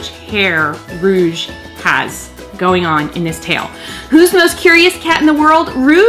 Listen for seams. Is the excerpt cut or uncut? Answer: cut